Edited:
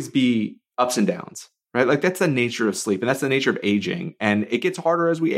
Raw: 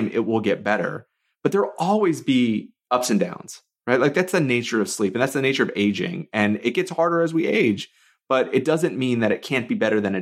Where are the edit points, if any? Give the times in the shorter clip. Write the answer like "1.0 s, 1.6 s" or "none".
none

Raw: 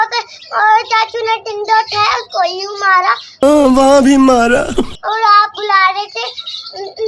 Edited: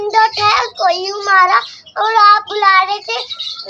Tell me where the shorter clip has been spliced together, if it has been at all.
1.7 s

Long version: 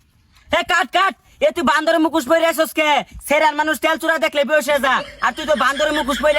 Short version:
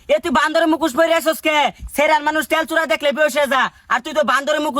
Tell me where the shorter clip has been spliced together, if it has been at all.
none

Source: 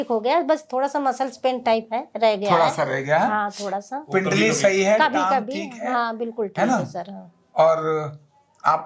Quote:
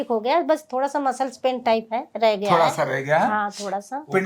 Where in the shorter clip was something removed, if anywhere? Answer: none

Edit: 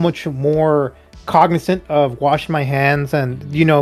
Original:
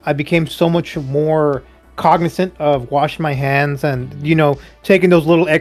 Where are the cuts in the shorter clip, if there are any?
none

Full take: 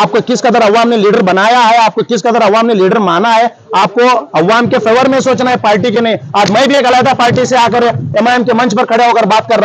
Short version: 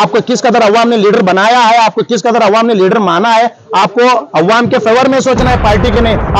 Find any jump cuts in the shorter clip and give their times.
none

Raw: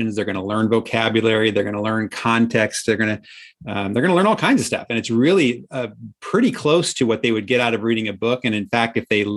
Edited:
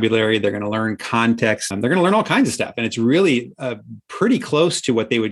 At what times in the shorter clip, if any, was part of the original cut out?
1.6 s

